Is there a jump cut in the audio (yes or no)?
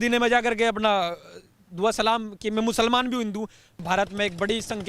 yes